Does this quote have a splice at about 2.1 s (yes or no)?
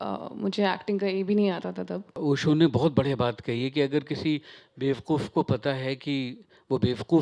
yes